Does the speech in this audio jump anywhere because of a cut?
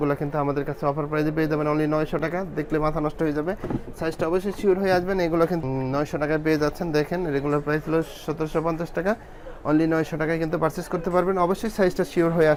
no; 0 cuts

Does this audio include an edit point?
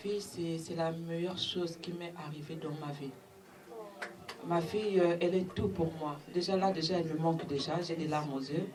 no; 0 cuts

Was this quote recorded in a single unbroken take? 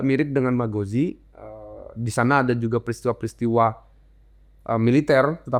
yes; 0 cuts

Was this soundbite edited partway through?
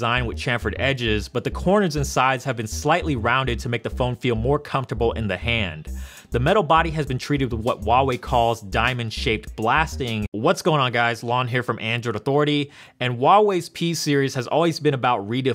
no; 0 cuts

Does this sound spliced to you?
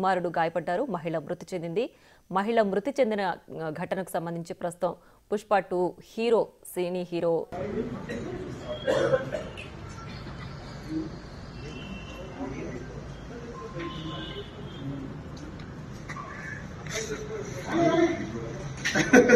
yes; 1 cut; at 7.5 s

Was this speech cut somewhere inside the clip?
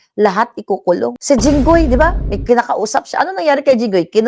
yes; 1 cut; at 1.2 s

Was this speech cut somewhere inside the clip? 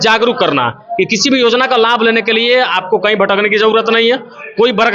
no; 0 cuts

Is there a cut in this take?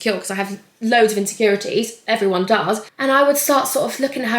yes; 1 cut; at 2.9 s

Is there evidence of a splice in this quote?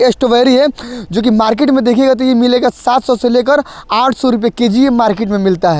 no; 0 cuts

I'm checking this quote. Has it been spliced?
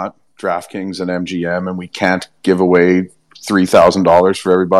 no; 0 cuts

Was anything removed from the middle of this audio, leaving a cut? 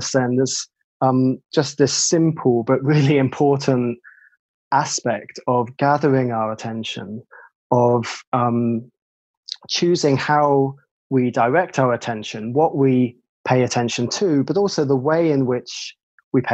no; 0 cuts

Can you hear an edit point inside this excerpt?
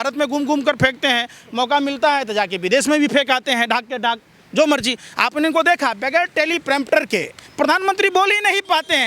no; 0 cuts

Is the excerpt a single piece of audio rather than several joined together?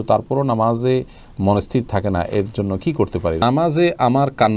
no; 1 cut; at 3.4 s

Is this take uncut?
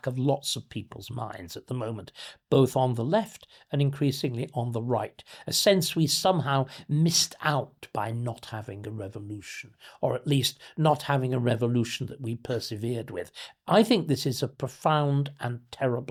yes; 0 cuts

